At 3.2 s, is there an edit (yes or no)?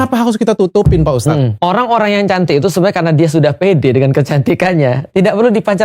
no